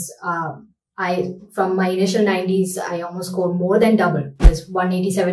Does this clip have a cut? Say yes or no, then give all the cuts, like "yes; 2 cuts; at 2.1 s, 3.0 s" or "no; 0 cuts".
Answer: no; 0 cuts